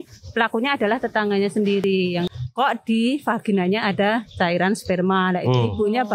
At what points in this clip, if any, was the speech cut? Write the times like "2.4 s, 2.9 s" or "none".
1.9 s